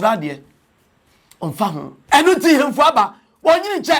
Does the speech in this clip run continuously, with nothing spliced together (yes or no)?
no